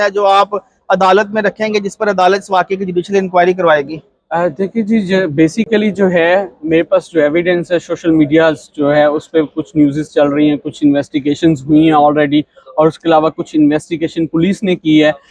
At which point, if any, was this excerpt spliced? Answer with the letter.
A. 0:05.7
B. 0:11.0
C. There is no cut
C